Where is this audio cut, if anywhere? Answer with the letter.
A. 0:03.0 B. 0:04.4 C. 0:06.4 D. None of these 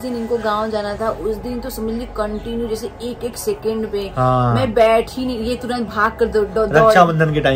D